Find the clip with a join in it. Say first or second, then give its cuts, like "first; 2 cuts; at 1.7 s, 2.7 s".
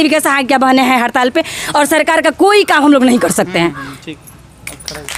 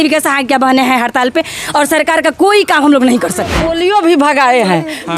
second; 1 cut; at 3.6 s